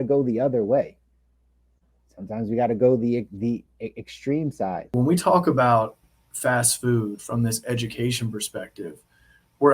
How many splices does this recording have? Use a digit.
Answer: 1